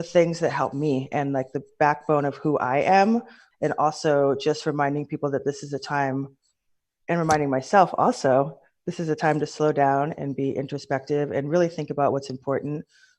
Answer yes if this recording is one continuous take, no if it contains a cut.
no